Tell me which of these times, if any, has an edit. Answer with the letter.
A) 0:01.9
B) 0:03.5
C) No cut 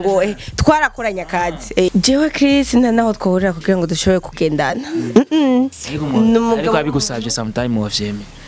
A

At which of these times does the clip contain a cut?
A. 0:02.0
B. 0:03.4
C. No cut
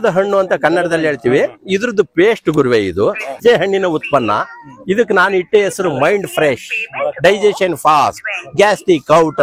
B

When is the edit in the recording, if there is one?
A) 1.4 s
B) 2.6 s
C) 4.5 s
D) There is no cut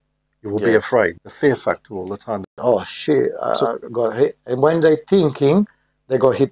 B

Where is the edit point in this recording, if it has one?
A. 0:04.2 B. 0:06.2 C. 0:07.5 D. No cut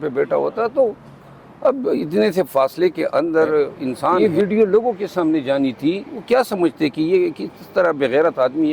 A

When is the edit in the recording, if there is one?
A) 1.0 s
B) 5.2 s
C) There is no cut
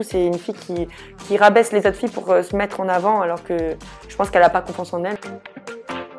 B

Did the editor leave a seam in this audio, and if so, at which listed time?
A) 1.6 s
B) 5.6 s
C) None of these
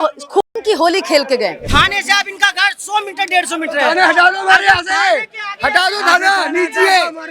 A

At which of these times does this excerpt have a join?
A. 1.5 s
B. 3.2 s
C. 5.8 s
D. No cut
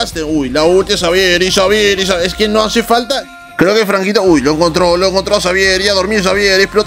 B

